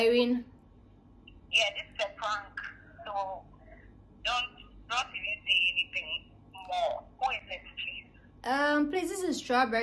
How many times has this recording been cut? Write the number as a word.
zero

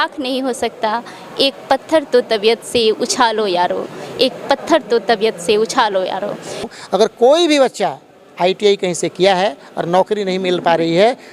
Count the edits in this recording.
one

